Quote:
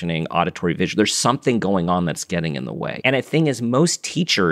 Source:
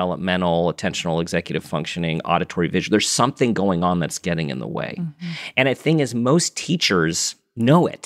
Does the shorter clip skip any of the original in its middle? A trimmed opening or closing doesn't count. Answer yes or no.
yes